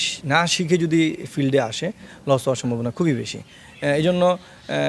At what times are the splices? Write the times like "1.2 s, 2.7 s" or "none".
none